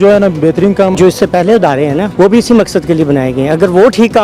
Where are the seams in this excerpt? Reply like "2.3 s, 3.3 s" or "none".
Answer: 0.9 s, 2.1 s

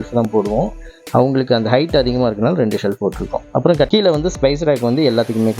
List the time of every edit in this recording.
3.9 s

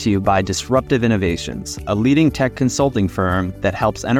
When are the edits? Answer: none

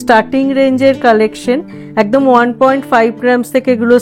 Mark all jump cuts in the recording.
none

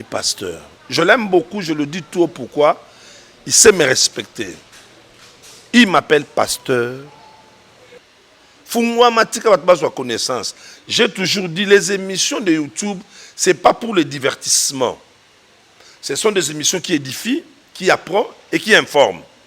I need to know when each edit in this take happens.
7.9 s

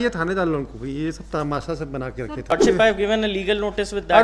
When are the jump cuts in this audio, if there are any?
2.5 s

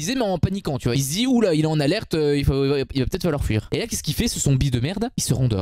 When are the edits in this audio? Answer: 0.9 s, 3.7 s

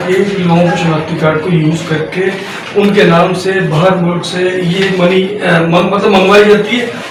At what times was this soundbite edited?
none

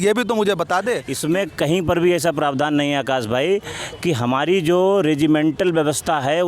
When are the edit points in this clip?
1.1 s

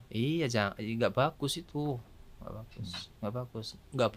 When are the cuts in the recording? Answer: none

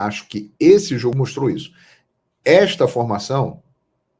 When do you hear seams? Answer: 1.1 s

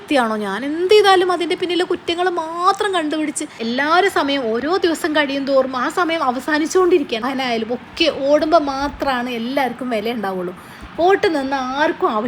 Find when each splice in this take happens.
3.6 s, 7.3 s

